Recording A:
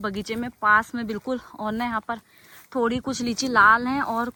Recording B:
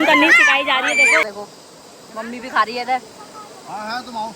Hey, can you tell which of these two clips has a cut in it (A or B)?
B